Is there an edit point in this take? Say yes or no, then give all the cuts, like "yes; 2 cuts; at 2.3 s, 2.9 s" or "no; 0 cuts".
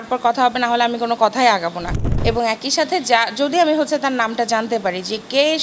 yes; 1 cut; at 2.1 s